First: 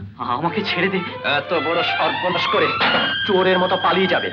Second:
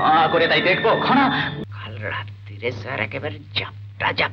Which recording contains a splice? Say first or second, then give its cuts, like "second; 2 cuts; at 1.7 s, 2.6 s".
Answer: second; 1 cut; at 1.5 s